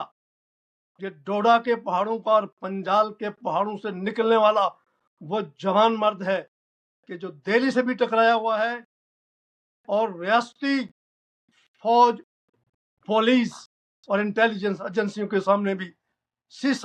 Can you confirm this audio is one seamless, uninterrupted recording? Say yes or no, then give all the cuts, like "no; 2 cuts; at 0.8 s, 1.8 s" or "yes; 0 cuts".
yes; 0 cuts